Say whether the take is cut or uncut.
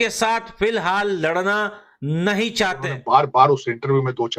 cut